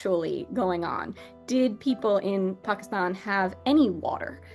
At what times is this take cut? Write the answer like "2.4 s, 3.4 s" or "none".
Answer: none